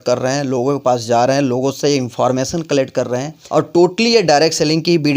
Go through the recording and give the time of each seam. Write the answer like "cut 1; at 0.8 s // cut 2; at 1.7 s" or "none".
cut 1; at 3.3 s

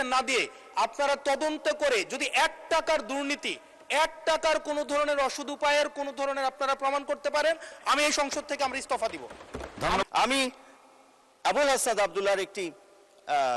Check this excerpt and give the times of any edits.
cut 1; at 10.0 s

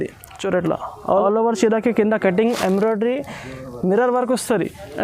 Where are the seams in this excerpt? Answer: cut 1; at 0.9 s

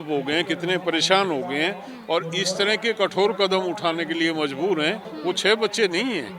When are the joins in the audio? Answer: cut 1; at 5.1 s

